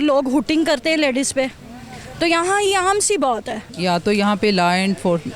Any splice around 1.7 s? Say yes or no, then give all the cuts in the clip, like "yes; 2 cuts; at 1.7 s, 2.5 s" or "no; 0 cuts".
no; 1 cut; at 3.7 s